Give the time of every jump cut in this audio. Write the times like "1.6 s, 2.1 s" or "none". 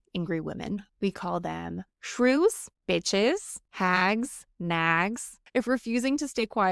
0.9 s, 2.7 s, 3.6 s, 4.4 s, 5.4 s